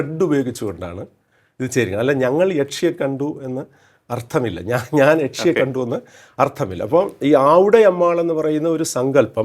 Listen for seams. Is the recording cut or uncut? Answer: uncut